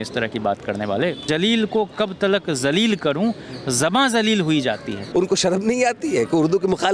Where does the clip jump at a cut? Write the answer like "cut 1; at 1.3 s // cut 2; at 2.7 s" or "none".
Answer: cut 1; at 1.2 s // cut 2; at 5.1 s

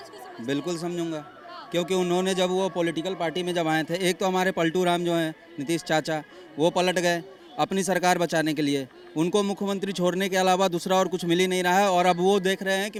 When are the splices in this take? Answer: none

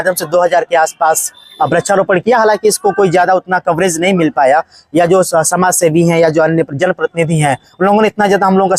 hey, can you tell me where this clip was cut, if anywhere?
none

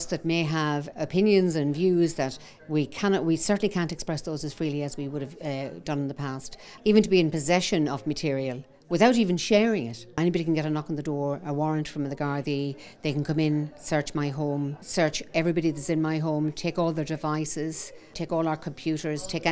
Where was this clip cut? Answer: cut 1; at 0.9 s // cut 2; at 6.7 s // cut 3; at 10.2 s // cut 4; at 14.8 s // cut 5; at 18.1 s

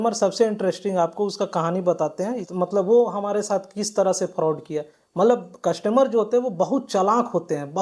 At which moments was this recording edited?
cut 1; at 2.4 s

